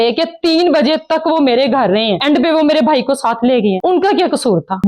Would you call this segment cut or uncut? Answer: cut